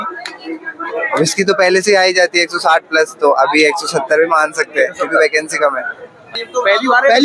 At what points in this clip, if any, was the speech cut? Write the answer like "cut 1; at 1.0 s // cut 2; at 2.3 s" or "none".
cut 1; at 6.2 s